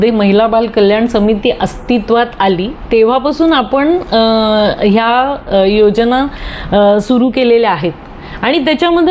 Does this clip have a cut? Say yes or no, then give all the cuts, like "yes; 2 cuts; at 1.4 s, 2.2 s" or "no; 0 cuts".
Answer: no; 0 cuts